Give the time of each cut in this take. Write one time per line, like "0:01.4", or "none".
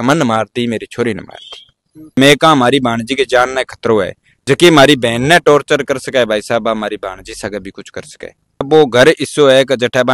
0:02.2
0:08.7